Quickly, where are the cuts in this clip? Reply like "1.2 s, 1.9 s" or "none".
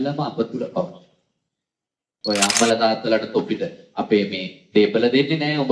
2.0 s